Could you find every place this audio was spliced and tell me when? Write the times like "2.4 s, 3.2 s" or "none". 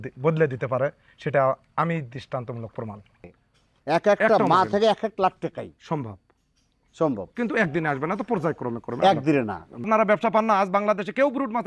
3.2 s, 9.9 s

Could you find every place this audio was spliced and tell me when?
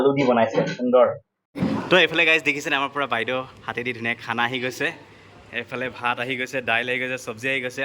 1.4 s

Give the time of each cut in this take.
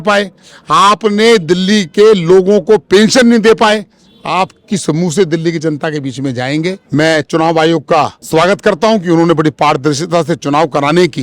6.8 s, 8.2 s

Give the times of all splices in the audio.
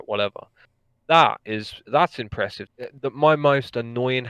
2.7 s

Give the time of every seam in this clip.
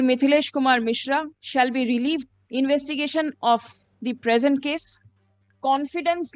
1.4 s, 2.4 s, 5.5 s

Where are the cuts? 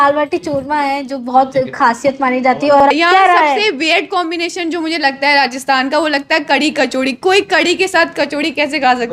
2.8 s

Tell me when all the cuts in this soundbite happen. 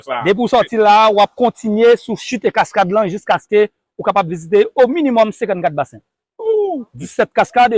none

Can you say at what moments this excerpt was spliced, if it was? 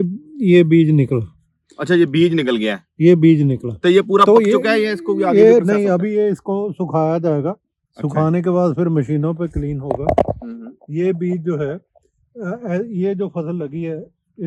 none

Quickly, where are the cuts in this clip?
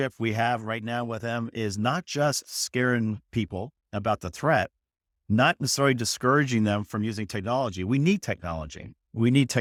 none

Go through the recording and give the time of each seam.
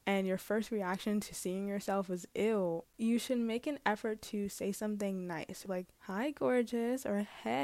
2.8 s, 5.6 s

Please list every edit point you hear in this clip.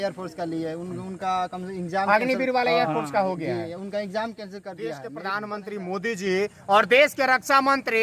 5.1 s

